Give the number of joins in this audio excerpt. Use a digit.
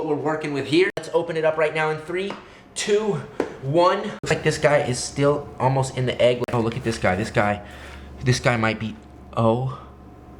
3